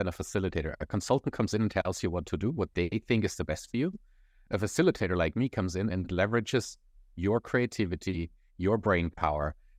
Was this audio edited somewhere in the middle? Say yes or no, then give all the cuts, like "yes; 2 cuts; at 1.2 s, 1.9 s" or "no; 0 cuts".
no; 0 cuts